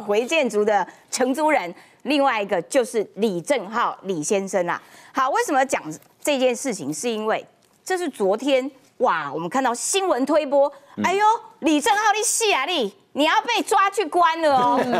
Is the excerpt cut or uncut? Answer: uncut